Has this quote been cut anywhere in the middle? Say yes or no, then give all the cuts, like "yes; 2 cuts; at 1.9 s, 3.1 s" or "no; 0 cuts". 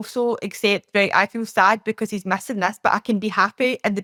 no; 0 cuts